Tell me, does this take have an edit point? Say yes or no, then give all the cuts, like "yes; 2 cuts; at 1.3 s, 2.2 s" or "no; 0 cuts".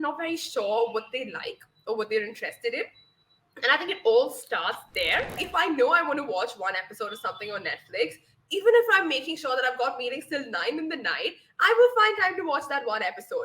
yes; 1 cut; at 5.4 s